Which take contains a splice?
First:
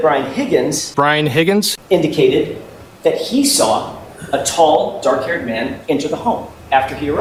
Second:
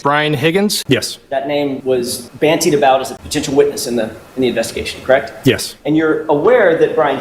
second; 4 cuts; at 0.8 s, 1.8 s, 3.2 s, 5.7 s

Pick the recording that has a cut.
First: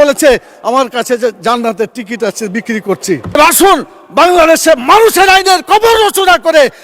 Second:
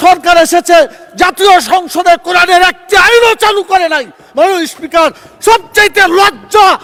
first; 1 cut; at 3.4 s

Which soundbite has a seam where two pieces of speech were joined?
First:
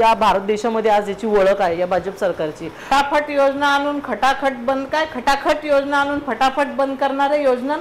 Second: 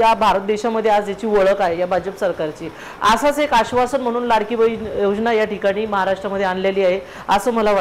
first; 1 cut; at 2.9 s

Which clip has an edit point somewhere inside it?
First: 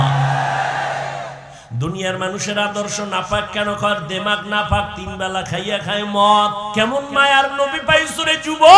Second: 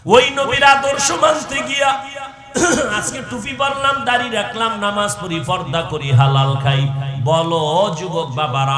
first; 1 cut; at 6.7 s

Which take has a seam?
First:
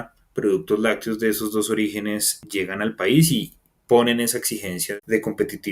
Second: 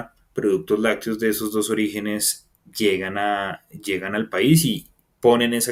first; 2 cuts; at 2.4 s, 4.8 s

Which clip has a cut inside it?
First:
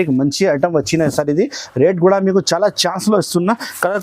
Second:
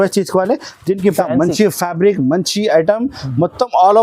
second; 1 cut; at 1.1 s

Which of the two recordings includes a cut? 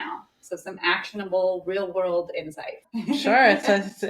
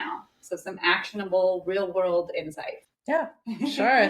first; 1 cut; at 2.9 s

